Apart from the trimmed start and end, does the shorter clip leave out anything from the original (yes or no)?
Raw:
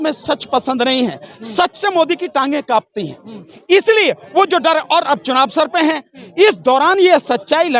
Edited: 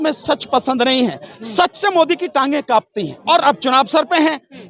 yes